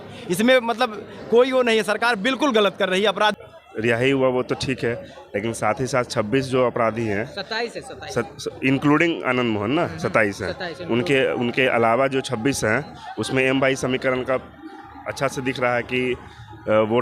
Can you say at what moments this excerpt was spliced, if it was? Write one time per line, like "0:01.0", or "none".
0:03.4